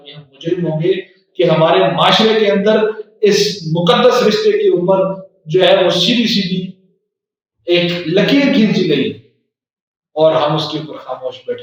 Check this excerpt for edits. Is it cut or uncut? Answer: uncut